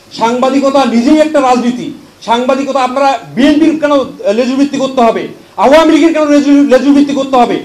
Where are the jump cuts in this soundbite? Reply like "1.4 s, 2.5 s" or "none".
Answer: none